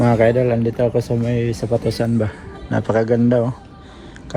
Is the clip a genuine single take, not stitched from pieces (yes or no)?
yes